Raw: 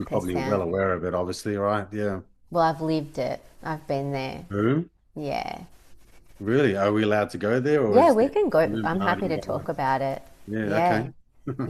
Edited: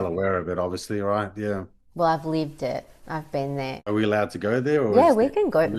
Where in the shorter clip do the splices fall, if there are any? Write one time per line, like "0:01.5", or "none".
0:03.9